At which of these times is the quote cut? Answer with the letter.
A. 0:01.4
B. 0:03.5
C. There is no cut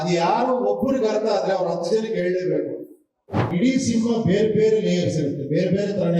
B